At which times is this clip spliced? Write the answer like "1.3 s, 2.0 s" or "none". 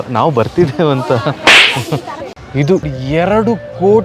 2.6 s